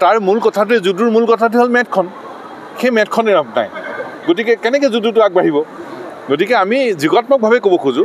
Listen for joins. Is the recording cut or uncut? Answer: uncut